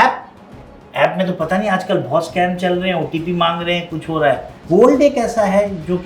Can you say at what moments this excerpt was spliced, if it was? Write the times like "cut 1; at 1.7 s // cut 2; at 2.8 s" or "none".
cut 1; at 4.6 s

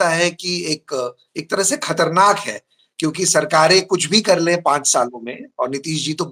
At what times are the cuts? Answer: none

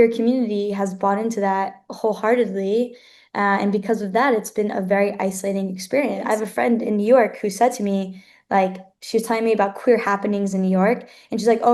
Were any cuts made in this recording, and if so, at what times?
cut 1; at 6.3 s

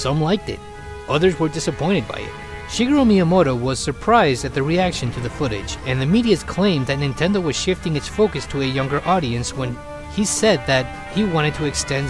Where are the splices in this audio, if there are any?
none

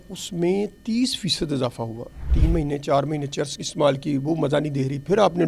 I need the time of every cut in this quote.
cut 1; at 2.3 s

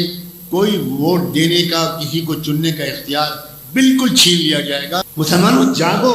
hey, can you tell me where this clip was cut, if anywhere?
cut 1; at 5.1 s

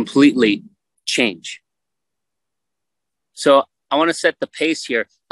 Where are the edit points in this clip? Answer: none

